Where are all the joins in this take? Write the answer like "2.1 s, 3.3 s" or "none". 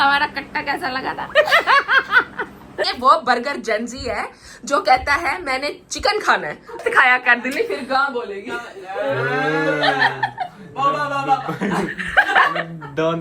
2.8 s, 6.8 s